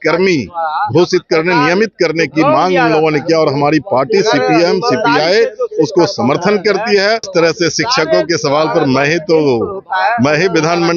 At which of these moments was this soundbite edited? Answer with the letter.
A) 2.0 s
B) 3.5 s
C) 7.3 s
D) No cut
C